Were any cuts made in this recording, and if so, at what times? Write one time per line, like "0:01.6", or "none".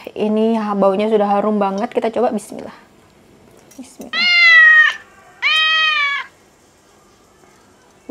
0:03.8